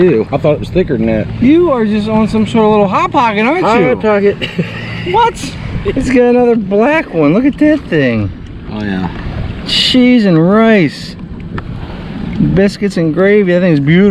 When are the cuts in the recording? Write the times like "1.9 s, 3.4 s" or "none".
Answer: none